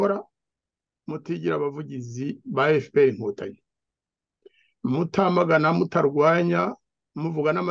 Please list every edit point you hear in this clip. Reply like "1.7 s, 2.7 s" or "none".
none

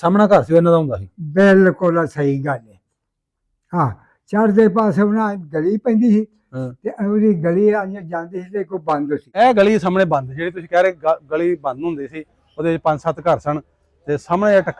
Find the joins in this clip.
9.3 s

